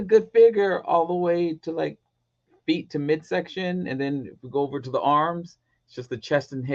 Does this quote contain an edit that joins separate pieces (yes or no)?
no